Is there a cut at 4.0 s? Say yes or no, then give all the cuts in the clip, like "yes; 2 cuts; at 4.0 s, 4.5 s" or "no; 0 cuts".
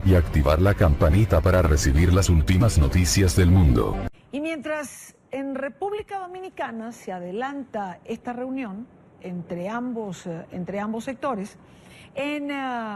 yes; 1 cut; at 4.0 s